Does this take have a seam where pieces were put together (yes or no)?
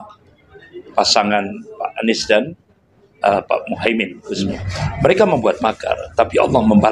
yes